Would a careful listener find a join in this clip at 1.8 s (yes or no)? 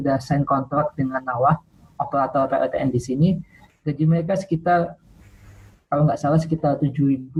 no